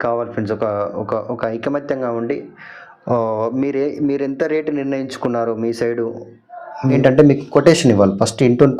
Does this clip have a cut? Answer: yes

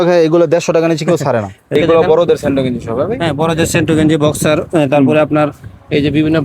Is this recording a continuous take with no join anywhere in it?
no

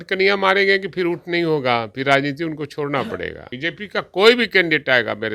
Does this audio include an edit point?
yes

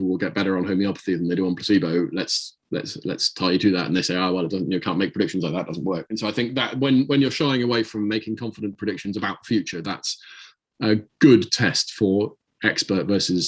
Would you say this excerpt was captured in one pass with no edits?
yes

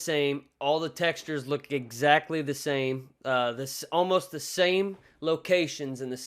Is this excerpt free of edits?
yes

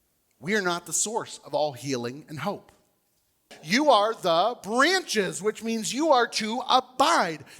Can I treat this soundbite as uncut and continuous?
no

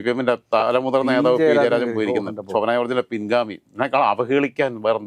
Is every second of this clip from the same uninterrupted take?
yes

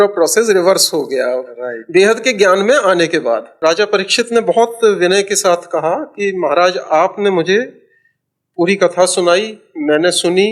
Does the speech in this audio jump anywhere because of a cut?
yes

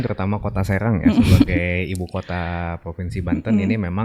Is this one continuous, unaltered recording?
yes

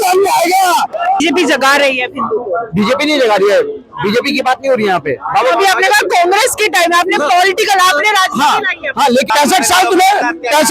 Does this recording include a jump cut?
yes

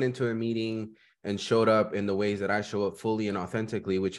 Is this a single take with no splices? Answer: yes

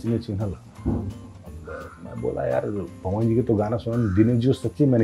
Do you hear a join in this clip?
no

